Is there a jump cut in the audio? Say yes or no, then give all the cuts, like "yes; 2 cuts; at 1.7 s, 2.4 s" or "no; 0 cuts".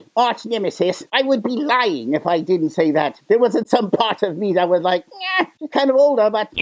no; 0 cuts